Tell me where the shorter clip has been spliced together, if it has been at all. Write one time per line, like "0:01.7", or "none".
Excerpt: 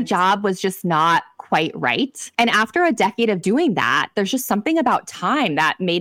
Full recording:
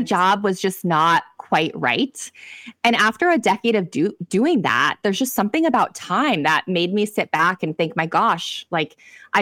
0:02.2
0:03.4

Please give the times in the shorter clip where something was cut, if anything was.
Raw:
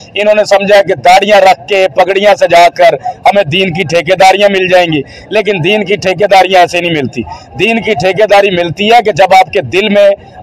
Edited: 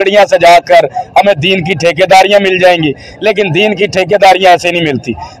none

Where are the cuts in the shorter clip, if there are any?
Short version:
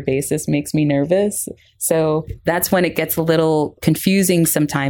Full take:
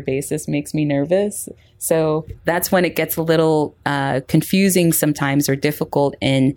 0:03.8

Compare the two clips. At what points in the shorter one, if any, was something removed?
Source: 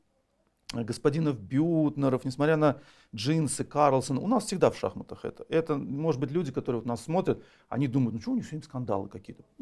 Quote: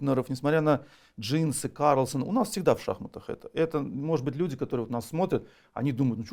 none

